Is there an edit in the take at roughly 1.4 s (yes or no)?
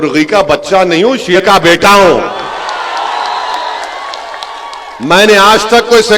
yes